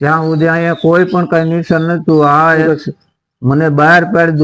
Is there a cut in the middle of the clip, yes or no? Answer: yes